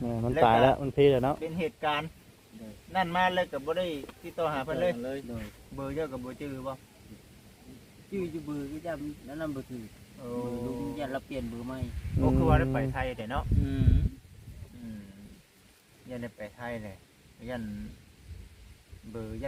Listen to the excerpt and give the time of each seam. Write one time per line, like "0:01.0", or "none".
none